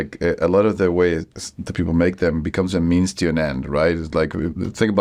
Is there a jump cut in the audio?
no; 0 cuts

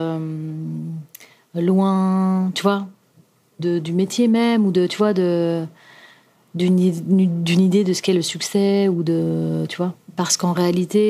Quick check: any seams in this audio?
no; 0 cuts

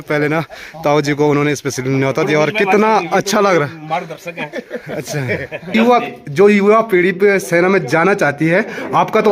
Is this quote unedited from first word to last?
no; 1 cut; at 5.7 s

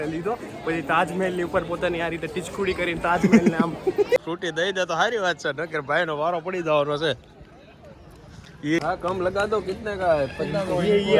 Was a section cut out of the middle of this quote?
yes; 2 cuts; at 4.2 s, 8.7 s

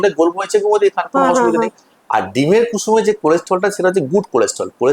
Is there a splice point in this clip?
no; 0 cuts

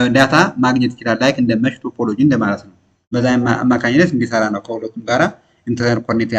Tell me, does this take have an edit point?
no; 0 cuts

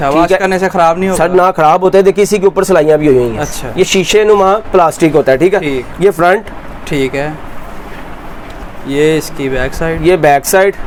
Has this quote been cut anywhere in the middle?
no; 0 cuts

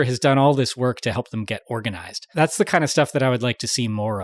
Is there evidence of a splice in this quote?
yes; 1 cut; at 2.3 s

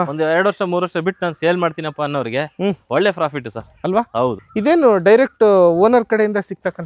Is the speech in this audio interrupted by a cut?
yes; 1 cut; at 4.4 s

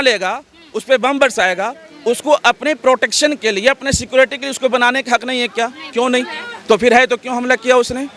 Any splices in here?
no; 0 cuts

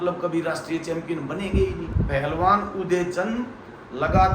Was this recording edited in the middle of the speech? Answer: yes; 1 cut; at 1.8 s

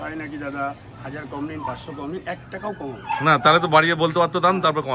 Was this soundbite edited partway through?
no; 0 cuts

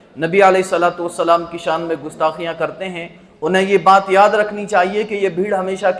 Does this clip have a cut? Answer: no; 0 cuts

